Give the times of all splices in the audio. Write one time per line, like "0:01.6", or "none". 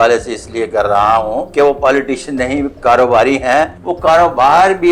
0:01.4
0:03.8